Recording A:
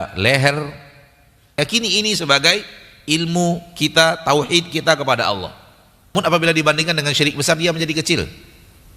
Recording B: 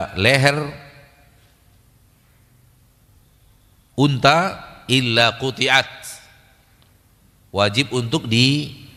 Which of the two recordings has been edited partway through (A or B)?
A